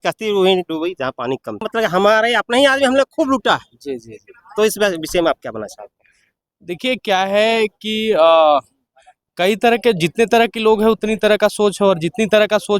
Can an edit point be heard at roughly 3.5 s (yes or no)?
no